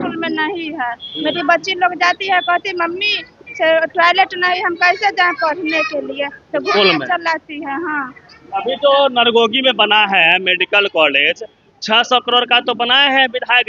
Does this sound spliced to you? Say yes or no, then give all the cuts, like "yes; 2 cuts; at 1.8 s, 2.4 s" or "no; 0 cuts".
no; 0 cuts